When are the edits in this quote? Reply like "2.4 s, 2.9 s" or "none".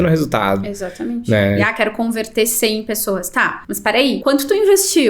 1.6 s, 4.0 s

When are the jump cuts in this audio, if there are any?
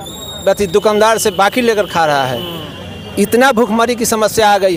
none

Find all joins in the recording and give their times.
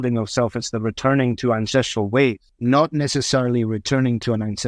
2.5 s

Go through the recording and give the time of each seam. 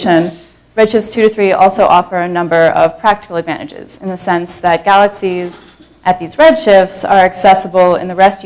3.6 s

